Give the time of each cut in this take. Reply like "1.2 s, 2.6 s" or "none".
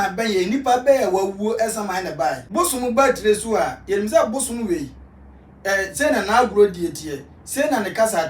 2.4 s